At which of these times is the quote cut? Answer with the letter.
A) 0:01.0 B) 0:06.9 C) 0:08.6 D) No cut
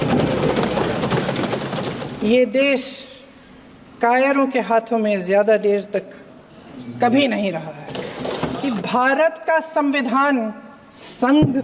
C